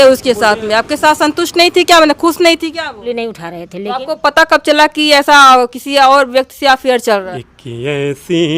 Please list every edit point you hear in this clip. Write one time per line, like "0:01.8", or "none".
0:03.0
0:07.3